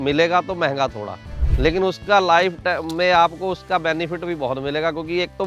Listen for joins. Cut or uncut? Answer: uncut